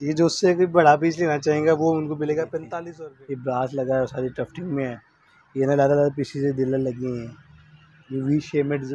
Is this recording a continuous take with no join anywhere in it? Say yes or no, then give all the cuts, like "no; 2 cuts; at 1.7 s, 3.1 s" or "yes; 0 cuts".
no; 1 cut; at 2.8 s